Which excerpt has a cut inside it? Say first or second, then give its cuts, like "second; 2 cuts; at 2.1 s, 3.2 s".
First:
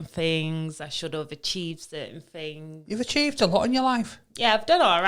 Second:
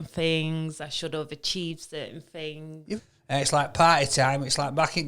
second; 1 cut; at 2.9 s